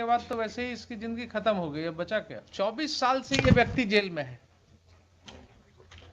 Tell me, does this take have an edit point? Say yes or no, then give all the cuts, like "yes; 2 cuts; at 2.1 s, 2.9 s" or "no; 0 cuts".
yes; 1 cut; at 2.4 s